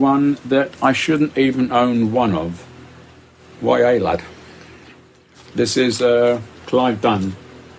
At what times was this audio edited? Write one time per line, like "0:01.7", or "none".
none